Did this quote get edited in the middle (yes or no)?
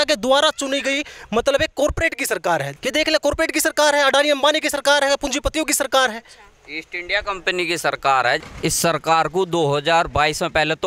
yes